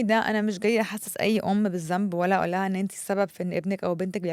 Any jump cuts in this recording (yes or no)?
no